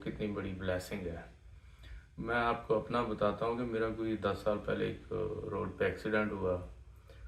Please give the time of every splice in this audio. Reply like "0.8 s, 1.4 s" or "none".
none